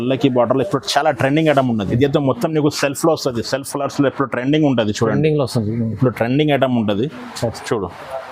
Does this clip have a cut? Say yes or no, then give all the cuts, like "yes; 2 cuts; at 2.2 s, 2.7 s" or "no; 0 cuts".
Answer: yes; 1 cut; at 1.9 s